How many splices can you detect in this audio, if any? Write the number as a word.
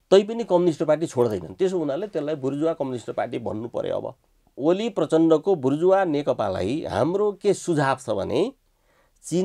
one